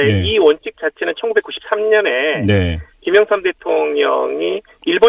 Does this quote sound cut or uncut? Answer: cut